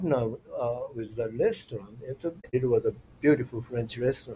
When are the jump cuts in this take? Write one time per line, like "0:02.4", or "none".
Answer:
0:02.5